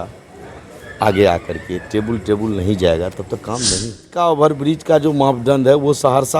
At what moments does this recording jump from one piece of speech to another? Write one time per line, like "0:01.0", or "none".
0:04.1